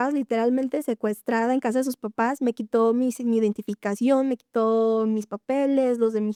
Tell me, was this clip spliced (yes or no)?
no